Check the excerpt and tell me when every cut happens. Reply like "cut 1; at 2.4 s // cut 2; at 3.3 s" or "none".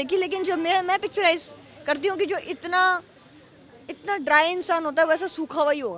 none